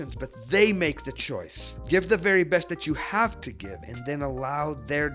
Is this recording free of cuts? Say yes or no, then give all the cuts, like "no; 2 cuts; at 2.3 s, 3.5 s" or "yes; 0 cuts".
no; 1 cut; at 1.7 s